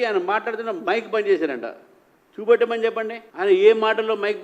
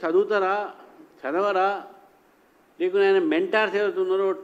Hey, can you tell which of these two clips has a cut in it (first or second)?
first